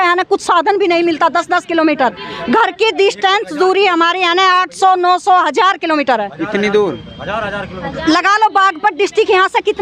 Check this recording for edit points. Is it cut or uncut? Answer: uncut